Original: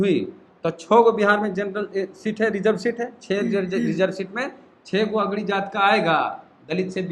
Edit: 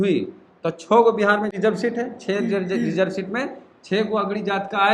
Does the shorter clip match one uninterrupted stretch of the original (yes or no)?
no